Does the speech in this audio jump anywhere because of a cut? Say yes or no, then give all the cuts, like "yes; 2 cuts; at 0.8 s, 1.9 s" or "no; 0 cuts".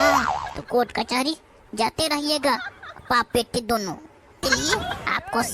yes; 1 cut; at 4.4 s